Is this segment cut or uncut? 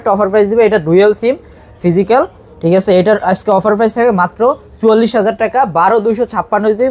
uncut